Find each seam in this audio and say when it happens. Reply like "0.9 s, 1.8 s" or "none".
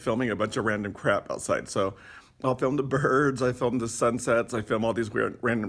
none